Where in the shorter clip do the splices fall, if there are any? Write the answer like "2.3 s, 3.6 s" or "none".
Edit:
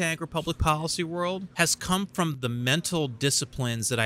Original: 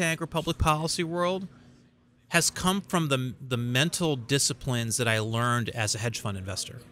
1.5 s, 2.3 s